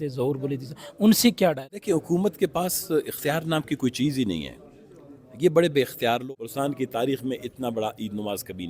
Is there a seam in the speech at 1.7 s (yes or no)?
yes